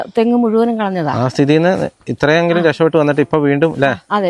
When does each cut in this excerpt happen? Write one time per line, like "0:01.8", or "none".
none